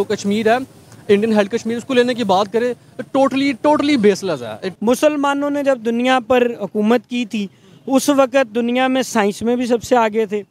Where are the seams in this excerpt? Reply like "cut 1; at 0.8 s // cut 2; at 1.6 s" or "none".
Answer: cut 1; at 4.6 s